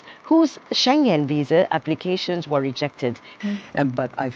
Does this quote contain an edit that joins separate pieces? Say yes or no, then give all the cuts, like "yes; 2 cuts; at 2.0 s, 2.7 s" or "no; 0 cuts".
yes; 1 cut; at 3.3 s